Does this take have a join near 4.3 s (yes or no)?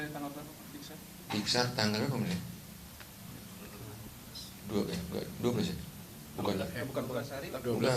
yes